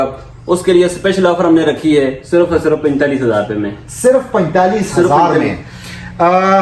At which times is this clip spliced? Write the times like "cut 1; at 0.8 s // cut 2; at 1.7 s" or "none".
none